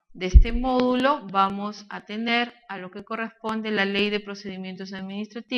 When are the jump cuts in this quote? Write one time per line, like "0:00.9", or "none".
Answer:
0:02.0